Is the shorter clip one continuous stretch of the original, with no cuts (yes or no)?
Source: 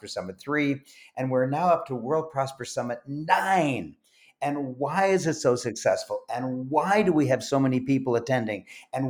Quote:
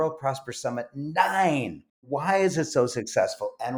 no